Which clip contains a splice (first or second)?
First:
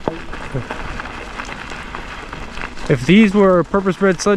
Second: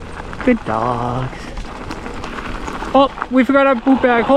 second